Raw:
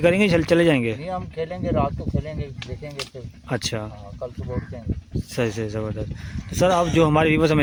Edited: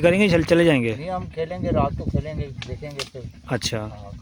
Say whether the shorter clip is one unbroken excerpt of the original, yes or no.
yes